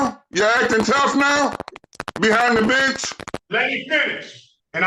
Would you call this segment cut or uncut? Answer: cut